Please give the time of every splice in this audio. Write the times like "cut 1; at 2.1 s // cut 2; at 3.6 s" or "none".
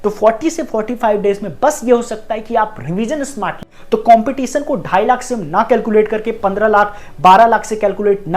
cut 1; at 3.6 s